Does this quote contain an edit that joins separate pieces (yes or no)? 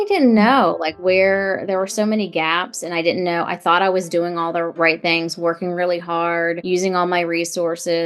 no